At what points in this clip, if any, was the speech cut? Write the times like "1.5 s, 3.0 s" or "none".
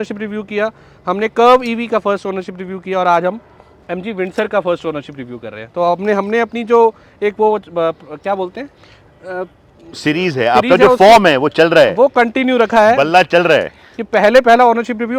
none